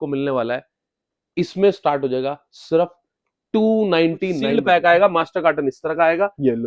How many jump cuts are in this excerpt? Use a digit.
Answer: 1